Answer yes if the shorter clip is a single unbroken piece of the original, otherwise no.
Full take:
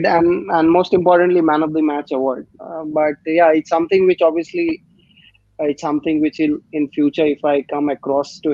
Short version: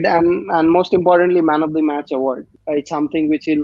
no